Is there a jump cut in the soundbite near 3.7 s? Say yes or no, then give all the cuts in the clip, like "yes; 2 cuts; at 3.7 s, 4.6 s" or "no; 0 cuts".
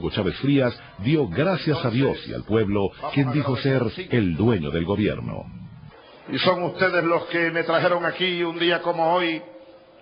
no; 1 cut; at 7.0 s